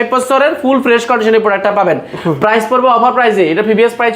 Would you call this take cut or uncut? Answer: uncut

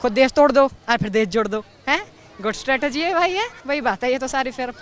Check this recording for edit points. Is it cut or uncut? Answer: cut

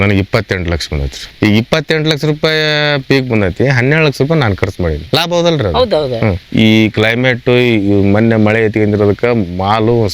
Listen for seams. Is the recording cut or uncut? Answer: cut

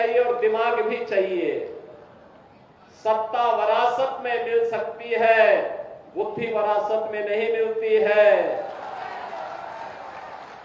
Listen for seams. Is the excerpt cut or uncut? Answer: uncut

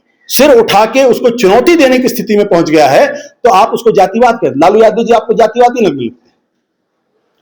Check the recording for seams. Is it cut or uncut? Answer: uncut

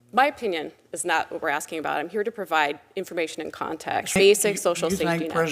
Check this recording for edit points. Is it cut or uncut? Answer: cut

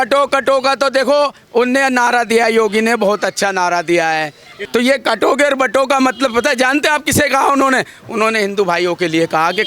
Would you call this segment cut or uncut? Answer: cut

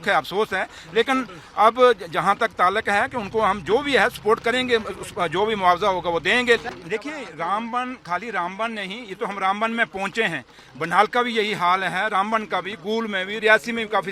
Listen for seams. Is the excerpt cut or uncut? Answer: cut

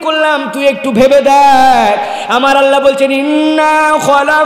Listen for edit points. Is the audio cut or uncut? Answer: uncut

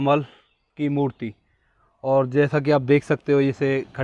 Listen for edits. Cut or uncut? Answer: uncut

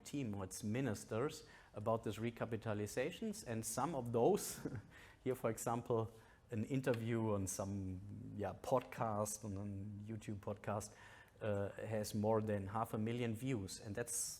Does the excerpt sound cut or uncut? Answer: uncut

